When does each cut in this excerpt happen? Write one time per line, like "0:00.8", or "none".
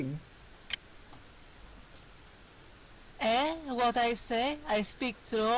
0:04.2